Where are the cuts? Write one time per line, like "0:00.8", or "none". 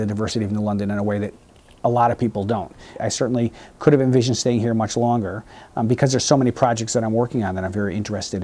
0:03.0

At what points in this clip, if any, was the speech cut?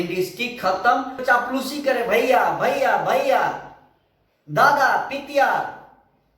0:01.2

